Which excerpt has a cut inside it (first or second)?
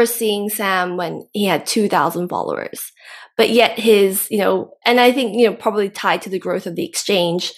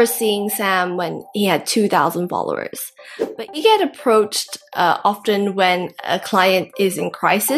second